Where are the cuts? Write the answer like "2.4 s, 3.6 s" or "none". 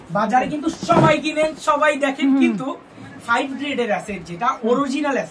none